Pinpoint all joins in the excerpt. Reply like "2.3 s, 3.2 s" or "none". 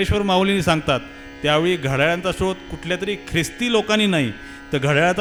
none